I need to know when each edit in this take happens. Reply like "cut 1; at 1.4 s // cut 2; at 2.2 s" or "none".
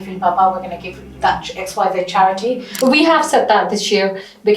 cut 1; at 2.7 s